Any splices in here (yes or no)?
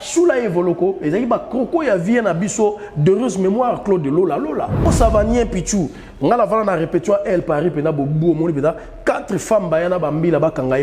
yes